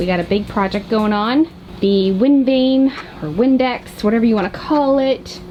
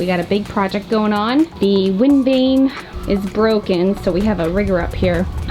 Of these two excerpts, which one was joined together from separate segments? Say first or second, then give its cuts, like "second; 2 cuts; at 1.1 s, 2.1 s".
second; 2 cuts; at 1.5 s, 2.9 s